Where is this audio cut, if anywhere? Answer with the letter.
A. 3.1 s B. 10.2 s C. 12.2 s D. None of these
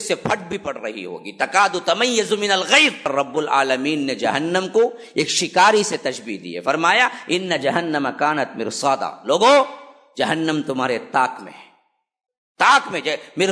A